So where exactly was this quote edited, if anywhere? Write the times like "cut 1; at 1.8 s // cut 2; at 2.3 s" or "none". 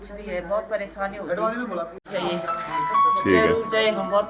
none